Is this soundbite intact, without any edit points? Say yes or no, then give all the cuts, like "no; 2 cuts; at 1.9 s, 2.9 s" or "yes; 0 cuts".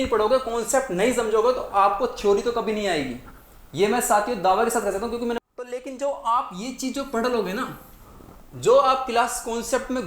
no; 1 cut; at 5.4 s